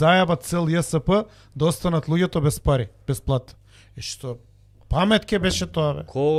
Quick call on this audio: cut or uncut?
uncut